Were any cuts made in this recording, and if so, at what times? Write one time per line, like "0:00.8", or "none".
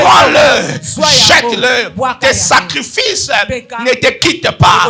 none

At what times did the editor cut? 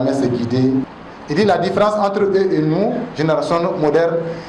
0:00.9

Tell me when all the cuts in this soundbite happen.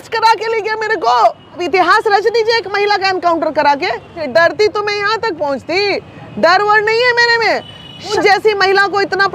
0:01.6
0:04.2
0:08.1

